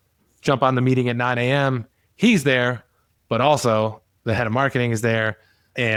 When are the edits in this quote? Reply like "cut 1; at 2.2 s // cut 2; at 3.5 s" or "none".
none